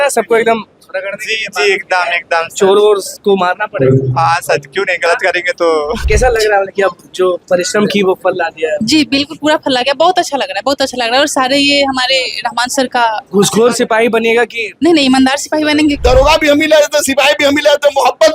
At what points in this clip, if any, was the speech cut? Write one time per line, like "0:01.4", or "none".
0:06.0
0:14.6
0:16.0